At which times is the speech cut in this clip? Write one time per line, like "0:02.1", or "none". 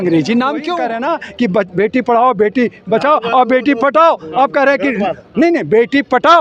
0:00.9